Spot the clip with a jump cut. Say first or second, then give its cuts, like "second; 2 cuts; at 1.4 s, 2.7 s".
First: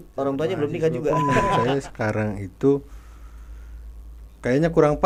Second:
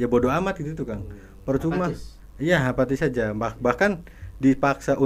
first; 1 cut; at 1.6 s